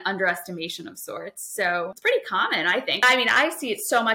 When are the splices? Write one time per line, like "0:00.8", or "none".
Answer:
0:02.0
0:03.0

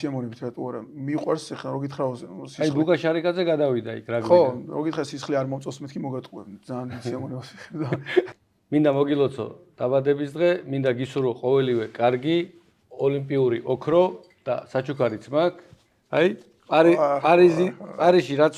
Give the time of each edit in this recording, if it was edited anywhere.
0:08.3

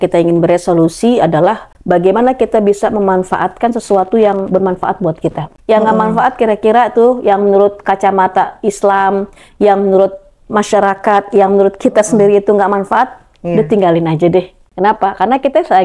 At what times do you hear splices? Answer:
0:01.7
0:05.5
0:14.6

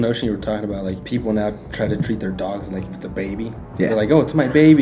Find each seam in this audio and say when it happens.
0:01.0

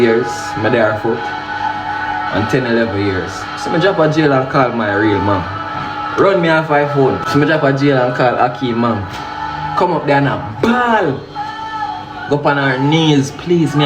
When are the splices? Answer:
0:07.2

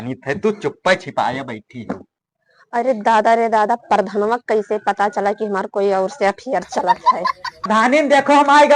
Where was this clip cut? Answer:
0:07.7

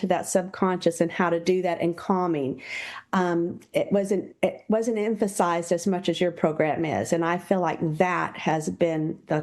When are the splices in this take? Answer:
none

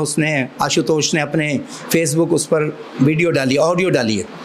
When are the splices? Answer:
none

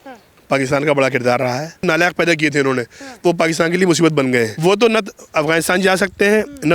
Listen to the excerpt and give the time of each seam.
0:01.8
0:04.5

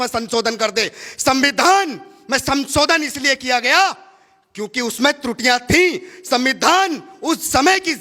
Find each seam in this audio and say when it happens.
none

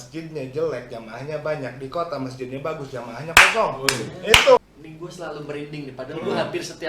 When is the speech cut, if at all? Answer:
0:04.6

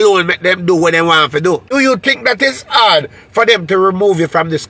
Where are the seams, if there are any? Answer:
0:01.7

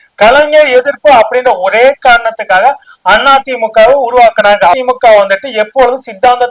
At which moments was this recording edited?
0:04.7

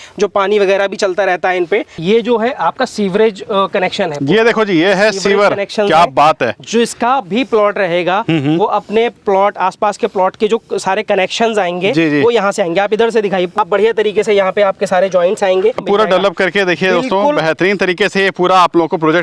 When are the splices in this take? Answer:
none

